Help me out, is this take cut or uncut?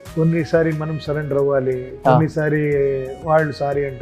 uncut